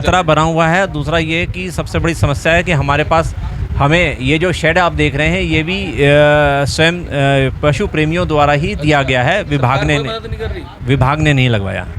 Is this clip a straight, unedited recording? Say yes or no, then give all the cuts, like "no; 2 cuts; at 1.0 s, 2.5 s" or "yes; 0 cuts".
yes; 0 cuts